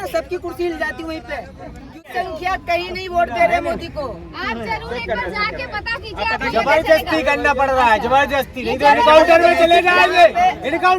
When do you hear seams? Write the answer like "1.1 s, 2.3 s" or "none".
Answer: 2.1 s